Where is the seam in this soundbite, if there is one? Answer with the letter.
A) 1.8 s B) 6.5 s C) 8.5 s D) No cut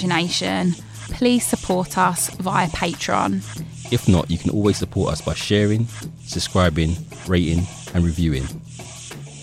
C